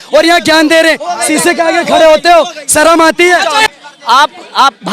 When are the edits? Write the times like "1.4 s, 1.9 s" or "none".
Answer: 3.6 s